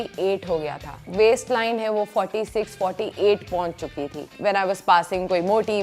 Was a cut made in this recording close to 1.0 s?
yes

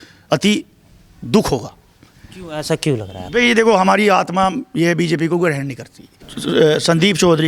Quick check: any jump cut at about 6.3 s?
yes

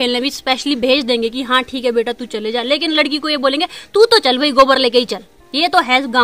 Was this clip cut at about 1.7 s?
no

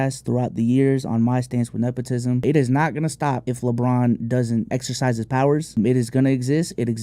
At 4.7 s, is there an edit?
yes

